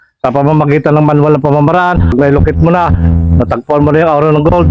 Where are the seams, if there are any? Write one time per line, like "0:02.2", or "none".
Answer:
0:02.1

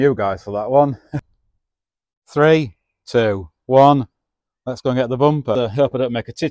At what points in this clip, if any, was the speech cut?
0:01.1
0:05.5

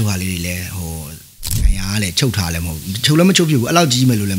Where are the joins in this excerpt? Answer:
0:01.6

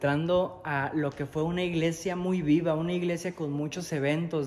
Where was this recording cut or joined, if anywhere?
none

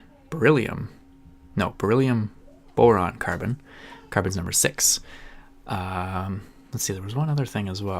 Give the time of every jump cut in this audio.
0:03.2

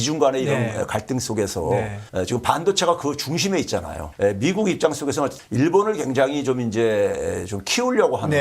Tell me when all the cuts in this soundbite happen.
0:02.0
0:04.0
0:05.4

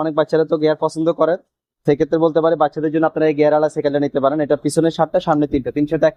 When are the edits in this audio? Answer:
none

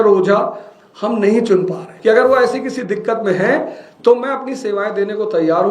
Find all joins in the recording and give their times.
0:01.9

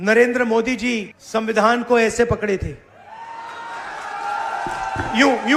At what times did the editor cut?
0:01.1

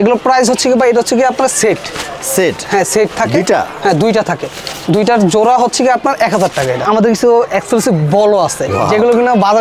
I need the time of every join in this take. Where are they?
0:06.8

